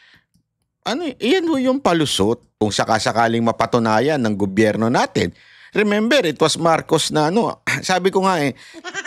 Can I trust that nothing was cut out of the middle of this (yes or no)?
no